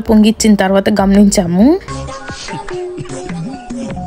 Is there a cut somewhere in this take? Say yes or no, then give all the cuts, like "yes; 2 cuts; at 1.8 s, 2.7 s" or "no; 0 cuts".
yes; 1 cut; at 2.1 s